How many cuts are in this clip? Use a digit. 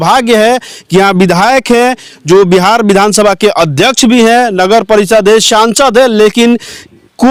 0